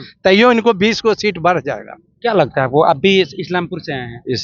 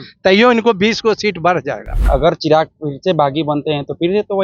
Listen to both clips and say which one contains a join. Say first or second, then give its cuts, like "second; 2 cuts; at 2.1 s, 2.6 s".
second; 1 cut; at 2.0 s